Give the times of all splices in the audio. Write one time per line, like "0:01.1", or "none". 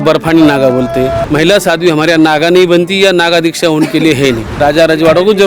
0:01.2
0:04.6